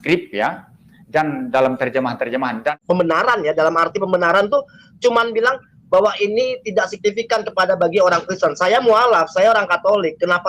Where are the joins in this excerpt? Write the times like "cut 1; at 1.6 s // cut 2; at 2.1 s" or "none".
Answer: cut 1; at 2.7 s